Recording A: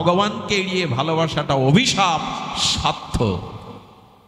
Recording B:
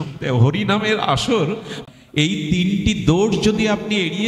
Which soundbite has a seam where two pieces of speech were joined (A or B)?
B